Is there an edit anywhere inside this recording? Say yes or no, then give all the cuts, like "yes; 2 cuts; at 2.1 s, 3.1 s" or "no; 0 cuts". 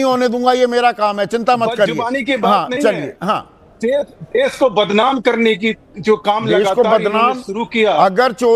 no; 0 cuts